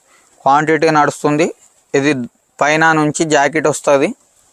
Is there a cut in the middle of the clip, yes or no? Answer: no